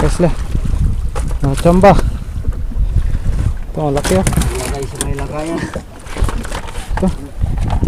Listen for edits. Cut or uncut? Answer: uncut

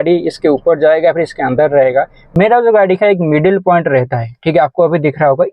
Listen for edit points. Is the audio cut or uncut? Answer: cut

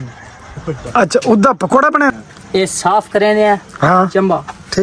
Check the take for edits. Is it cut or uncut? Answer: cut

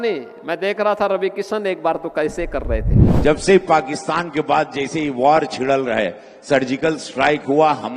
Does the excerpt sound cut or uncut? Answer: cut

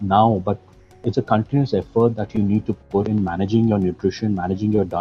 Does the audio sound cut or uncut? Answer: uncut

